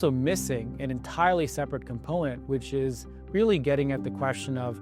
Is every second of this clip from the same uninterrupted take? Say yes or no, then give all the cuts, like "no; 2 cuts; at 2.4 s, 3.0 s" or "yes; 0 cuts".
yes; 0 cuts